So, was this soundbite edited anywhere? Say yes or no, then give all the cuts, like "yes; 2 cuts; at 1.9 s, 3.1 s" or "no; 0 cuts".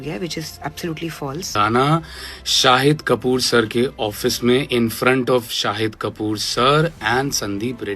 yes; 1 cut; at 1.5 s